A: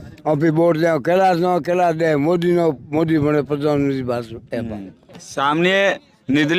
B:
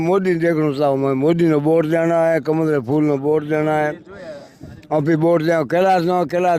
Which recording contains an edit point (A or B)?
A